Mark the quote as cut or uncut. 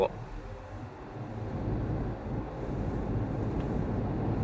uncut